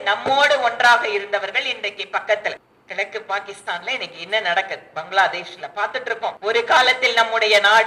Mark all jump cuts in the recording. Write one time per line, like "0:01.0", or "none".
0:02.7
0:06.4